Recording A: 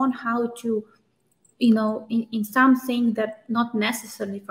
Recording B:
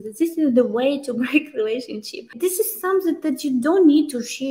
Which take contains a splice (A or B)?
B